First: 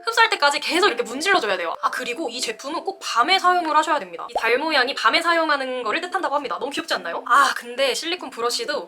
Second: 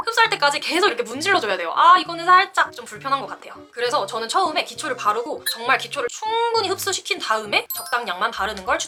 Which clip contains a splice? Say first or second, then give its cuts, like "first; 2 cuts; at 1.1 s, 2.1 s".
first; 3 cuts; at 1.8 s, 4.3 s, 7.2 s